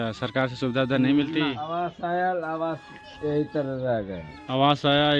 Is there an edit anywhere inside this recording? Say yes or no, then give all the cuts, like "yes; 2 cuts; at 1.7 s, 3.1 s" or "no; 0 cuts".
yes; 1 cut; at 1.6 s